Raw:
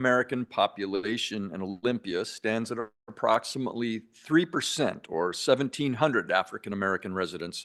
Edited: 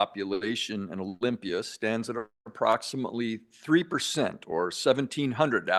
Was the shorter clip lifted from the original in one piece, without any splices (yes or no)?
yes